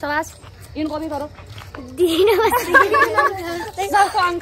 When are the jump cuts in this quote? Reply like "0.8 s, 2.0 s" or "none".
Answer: none